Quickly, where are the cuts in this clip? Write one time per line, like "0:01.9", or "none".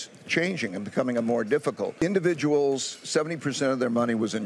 0:02.0